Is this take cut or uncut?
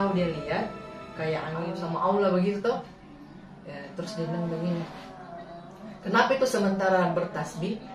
cut